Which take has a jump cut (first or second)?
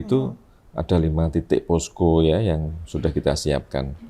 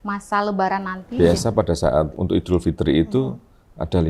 second